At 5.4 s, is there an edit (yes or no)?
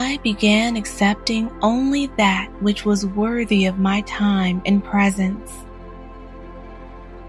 yes